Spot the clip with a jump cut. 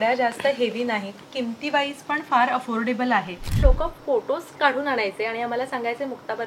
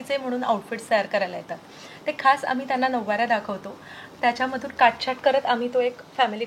first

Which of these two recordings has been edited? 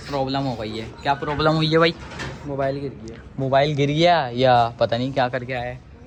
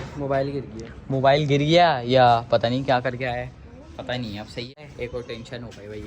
second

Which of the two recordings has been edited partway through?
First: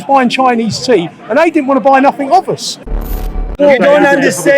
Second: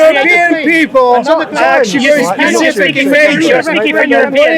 first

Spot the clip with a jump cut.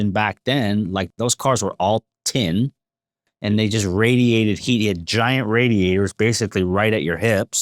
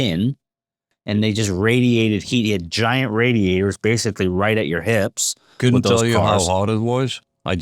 first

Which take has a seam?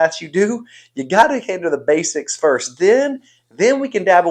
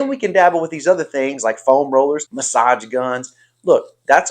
second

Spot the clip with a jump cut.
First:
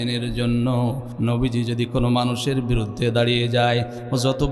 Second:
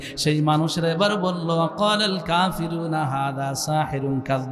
first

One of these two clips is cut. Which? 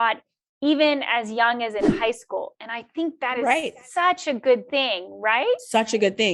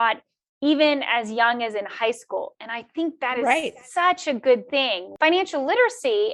second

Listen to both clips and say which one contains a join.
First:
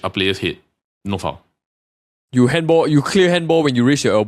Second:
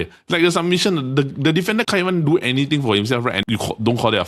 second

